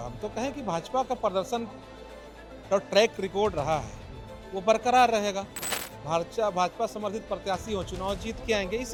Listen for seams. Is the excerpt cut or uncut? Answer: uncut